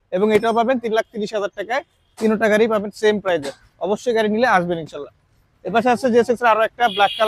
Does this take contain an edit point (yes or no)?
no